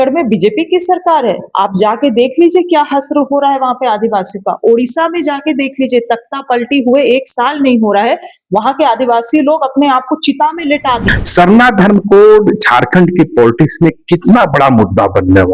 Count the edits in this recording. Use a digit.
1